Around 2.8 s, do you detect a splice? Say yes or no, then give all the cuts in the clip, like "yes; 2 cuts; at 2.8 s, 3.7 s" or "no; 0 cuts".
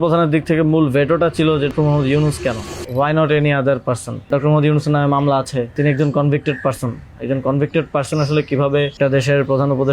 yes; 5 cuts; at 1.7 s, 2.8 s, 4.3 s, 5.7 s, 8.9 s